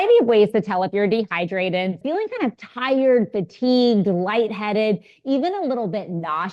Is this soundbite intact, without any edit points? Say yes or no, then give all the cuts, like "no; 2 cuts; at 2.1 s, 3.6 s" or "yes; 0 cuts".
no; 1 cut; at 2.0 s